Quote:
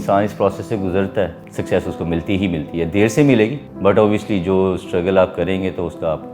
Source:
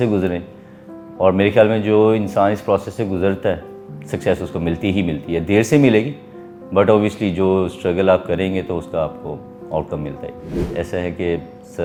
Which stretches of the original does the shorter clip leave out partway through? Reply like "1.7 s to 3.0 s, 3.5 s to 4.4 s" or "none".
3.8 s to 4.0 s, 6.2 s to 6.6 s